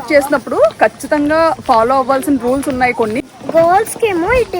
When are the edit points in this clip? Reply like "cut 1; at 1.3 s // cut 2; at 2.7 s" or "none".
cut 1; at 3.2 s